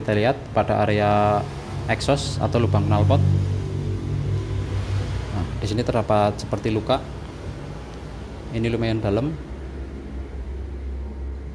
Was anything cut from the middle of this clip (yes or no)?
no